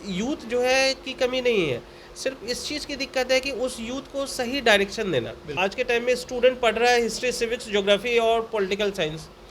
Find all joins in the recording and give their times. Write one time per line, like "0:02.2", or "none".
0:05.6